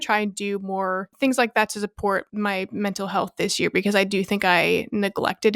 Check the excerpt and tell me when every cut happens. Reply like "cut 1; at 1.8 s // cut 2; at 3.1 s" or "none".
cut 1; at 1.1 s // cut 2; at 2.3 s